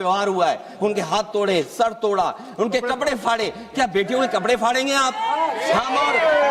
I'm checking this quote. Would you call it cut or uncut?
uncut